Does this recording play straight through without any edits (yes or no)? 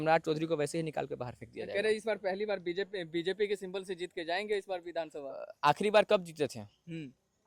yes